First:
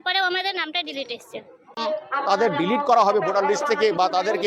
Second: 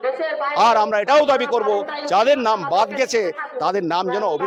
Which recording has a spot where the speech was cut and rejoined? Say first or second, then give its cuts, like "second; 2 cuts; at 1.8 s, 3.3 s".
first; 1 cut; at 1.8 s